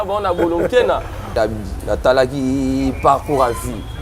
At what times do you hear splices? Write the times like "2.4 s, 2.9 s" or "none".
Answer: 1.3 s